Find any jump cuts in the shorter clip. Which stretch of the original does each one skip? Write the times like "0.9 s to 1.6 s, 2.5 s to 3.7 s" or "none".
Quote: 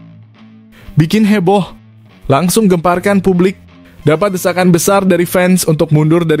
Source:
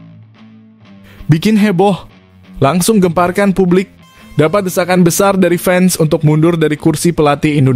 0.9 s to 1.3 s